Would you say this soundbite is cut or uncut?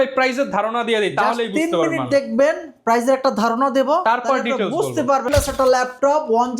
cut